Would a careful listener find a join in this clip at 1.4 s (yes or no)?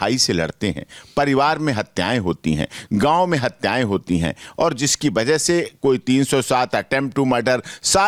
no